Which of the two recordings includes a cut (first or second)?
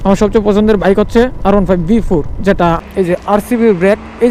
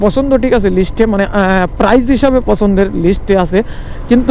first